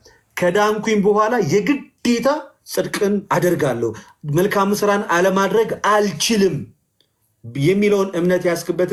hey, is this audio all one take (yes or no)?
yes